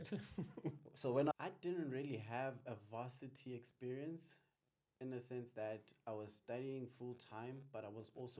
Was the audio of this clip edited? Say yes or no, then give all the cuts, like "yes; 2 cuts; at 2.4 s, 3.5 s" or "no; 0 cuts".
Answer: yes; 1 cut; at 1.3 s